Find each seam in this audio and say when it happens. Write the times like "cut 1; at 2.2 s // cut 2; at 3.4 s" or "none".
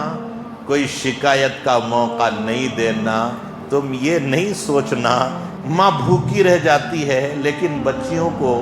cut 1; at 5.5 s